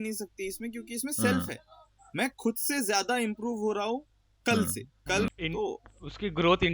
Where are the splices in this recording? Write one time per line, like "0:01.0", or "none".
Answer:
0:05.3